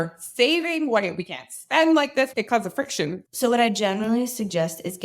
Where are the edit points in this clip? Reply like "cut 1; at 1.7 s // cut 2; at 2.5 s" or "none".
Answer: cut 1; at 2.3 s // cut 2; at 3.2 s